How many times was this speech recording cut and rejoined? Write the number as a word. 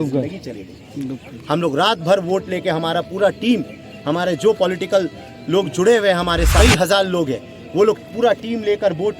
one